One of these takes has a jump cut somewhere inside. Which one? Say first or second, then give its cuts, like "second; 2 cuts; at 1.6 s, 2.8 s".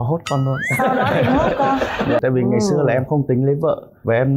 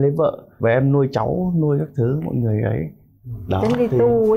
first; 1 cut; at 2.2 s